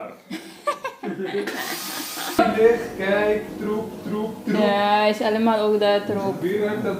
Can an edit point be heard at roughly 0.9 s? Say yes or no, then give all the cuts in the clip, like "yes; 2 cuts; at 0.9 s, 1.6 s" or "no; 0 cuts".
no; 1 cut; at 2.4 s